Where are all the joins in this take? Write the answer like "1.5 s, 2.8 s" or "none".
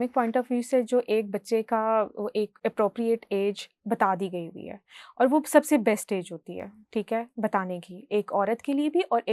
none